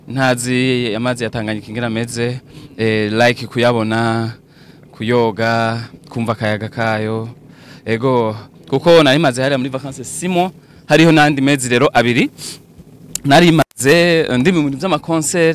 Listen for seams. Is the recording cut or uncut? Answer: uncut